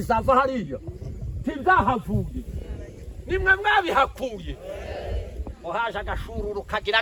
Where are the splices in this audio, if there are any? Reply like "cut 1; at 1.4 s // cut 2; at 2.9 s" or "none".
none